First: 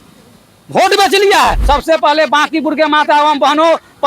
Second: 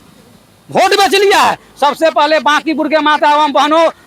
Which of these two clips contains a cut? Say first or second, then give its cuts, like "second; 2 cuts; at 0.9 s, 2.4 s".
first; 1 cut; at 1.6 s